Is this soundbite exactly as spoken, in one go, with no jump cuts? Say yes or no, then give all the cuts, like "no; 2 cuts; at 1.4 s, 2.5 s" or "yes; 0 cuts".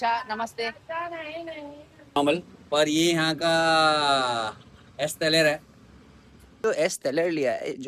no; 2 cuts; at 2.2 s, 6.6 s